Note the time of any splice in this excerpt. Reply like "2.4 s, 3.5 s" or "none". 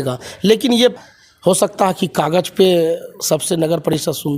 0.9 s